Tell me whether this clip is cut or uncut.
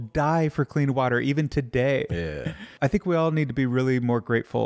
cut